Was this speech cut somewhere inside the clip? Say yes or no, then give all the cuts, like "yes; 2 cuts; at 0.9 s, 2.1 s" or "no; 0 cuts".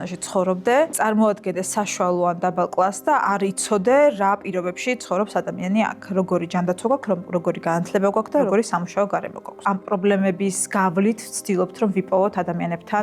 yes; 1 cut; at 0.9 s